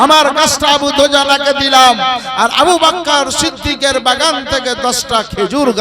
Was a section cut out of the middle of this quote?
no; 0 cuts

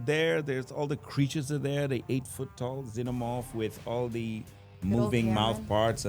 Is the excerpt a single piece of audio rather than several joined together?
yes; 0 cuts

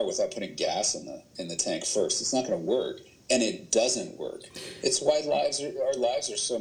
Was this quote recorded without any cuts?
yes; 0 cuts

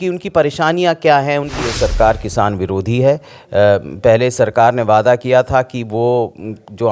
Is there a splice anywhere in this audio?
yes; 1 cut; at 1.6 s

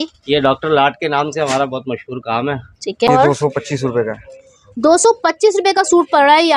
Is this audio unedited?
no; 1 cut; at 3.1 s

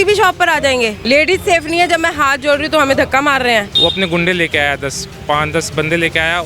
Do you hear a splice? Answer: yes; 2 cuts; at 1.0 s, 3.7 s

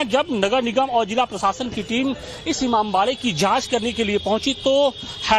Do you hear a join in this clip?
no; 0 cuts

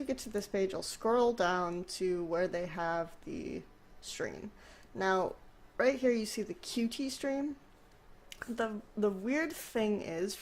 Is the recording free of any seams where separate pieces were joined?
no; 1 cut; at 2.5 s

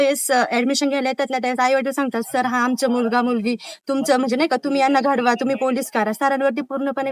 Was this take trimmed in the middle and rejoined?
no; 0 cuts

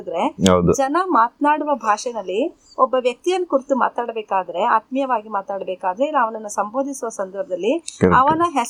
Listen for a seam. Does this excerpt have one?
no; 0 cuts

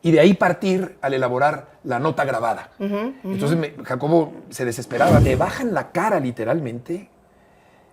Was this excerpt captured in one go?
no; 1 cut; at 5.2 s

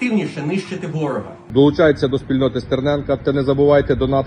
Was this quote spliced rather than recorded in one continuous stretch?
yes; 1 cut; at 1.3 s

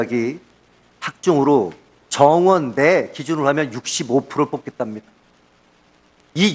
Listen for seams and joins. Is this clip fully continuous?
no; 1 cut; at 5.6 s

